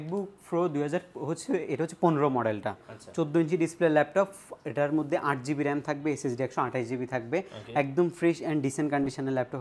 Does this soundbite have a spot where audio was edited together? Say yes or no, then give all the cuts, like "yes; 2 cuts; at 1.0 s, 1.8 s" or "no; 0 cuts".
no; 0 cuts